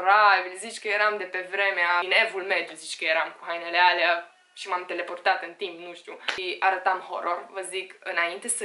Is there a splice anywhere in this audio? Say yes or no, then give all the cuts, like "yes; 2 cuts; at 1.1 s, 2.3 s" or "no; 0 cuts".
yes; 2 cuts; at 2.0 s, 6.4 s